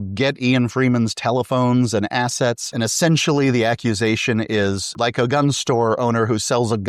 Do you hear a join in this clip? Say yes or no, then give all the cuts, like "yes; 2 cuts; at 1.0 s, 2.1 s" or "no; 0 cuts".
yes; 2 cuts; at 2.7 s, 4.9 s